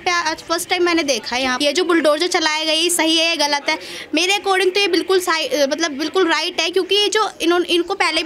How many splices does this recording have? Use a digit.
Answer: 1